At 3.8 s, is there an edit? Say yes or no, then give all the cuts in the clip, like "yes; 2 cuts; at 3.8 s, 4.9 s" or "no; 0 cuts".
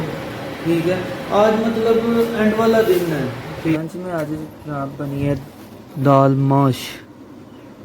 yes; 1 cut; at 3.8 s